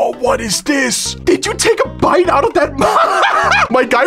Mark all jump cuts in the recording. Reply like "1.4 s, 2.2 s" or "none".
1.1 s